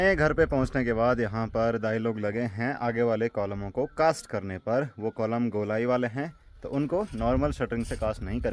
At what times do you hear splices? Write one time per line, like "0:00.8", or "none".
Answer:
none